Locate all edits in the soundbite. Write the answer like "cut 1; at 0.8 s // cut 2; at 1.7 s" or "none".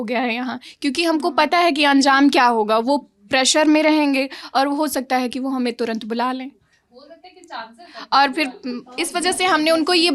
none